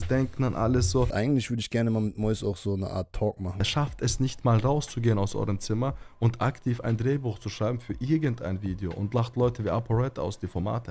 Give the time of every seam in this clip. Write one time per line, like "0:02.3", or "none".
0:01.1
0:03.5